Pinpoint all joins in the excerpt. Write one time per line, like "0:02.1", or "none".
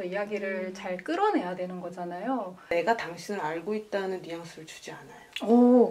0:02.7